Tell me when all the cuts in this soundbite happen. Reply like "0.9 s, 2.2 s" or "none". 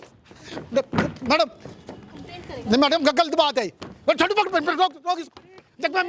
none